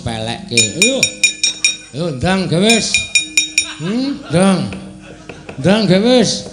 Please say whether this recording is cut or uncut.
uncut